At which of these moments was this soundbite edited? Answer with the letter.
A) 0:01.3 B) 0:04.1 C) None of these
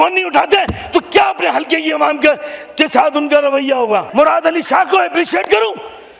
B